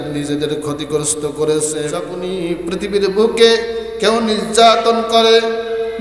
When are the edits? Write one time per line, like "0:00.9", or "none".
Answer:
0:02.2